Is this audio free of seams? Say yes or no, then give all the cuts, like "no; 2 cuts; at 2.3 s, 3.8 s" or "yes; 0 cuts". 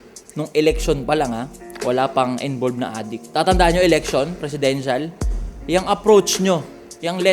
no; 1 cut; at 3.1 s